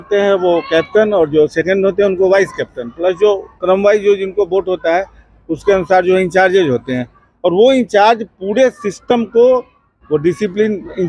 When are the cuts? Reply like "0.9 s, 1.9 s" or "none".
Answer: none